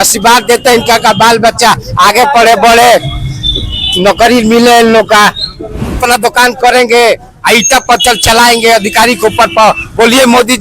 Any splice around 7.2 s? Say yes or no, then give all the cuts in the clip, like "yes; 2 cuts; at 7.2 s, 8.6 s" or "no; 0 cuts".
no; 1 cut; at 6.0 s